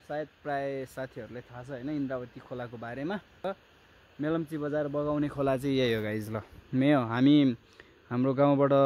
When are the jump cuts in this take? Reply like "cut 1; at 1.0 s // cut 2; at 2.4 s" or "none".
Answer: cut 1; at 3.3 s